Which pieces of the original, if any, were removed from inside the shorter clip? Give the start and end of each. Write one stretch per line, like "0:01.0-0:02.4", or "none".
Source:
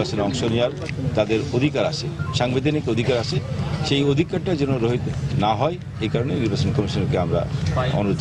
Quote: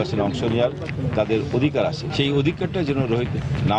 0:02.0-0:03.8